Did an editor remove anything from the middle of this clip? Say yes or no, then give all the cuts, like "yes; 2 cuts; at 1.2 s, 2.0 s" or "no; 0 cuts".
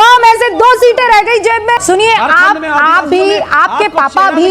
yes; 1 cut; at 1.8 s